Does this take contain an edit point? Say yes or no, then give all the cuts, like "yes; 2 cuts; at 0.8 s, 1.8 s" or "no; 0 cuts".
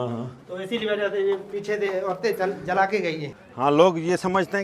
yes; 1 cut; at 3.4 s